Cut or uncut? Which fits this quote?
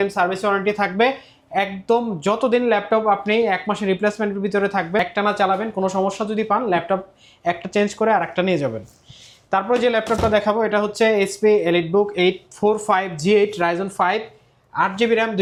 uncut